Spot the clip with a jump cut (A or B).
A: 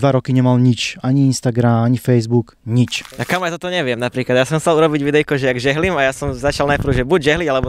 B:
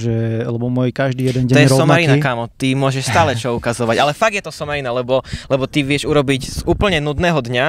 A